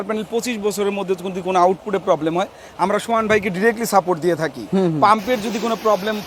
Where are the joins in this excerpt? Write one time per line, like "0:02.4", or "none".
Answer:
none